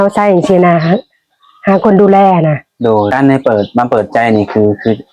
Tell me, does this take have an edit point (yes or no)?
yes